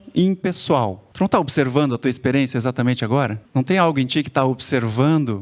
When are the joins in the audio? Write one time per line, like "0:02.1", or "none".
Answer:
0:01.0
0:03.4

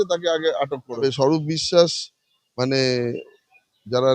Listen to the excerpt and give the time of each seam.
0:01.0

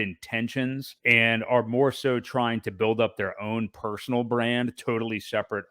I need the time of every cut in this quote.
0:00.9

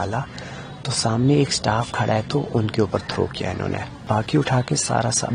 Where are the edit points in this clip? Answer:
0:04.0

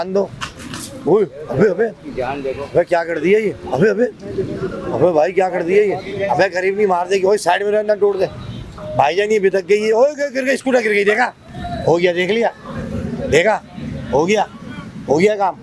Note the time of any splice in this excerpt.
none

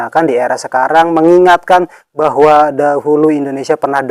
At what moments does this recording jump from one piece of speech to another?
none

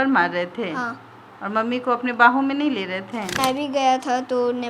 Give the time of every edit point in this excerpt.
0:03.4

